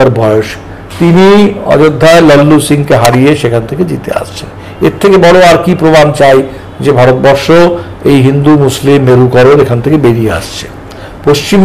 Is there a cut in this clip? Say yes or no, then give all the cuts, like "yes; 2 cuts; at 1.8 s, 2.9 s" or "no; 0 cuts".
no; 0 cuts